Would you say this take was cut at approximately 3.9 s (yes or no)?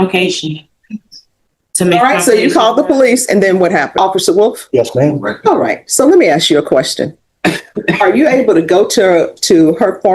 yes